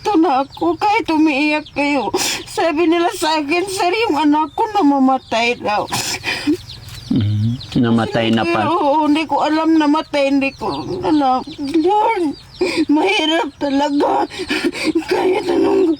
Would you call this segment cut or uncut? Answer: cut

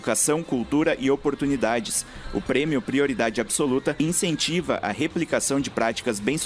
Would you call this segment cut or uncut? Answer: cut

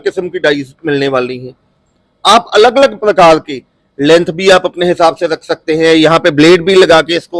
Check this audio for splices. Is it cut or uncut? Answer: uncut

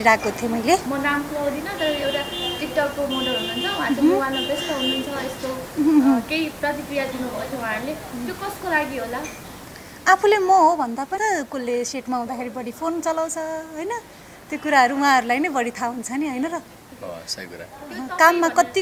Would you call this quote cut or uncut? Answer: cut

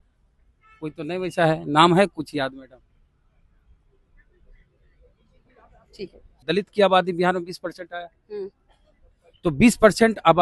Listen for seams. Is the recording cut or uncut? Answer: cut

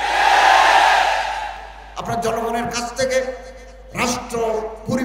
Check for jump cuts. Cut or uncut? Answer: cut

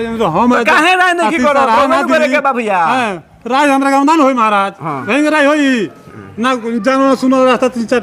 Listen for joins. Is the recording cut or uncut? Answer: uncut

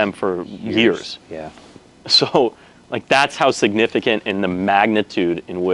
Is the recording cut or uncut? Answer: uncut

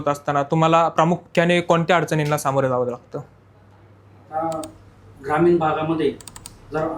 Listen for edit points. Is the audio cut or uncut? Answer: uncut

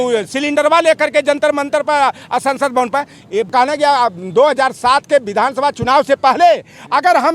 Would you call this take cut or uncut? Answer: cut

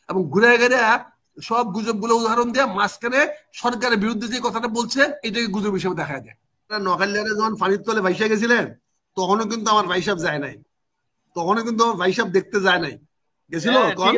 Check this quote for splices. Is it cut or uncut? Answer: cut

